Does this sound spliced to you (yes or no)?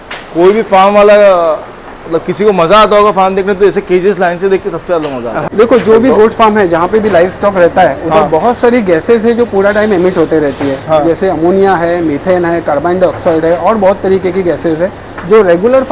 yes